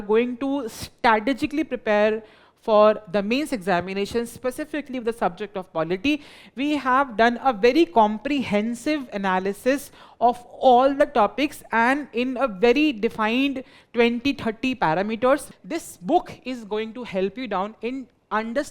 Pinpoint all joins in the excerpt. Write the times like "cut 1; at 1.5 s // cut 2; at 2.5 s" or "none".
cut 1; at 15.5 s